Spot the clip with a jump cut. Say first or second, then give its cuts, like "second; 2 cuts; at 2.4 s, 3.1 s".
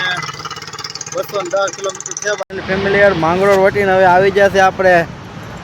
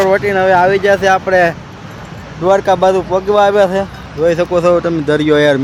first; 1 cut; at 2.4 s